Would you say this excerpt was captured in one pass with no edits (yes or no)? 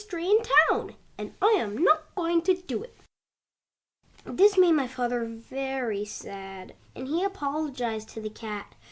no